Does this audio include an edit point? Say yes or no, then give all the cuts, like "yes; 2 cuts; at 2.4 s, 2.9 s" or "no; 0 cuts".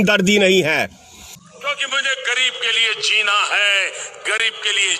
yes; 1 cut; at 1.4 s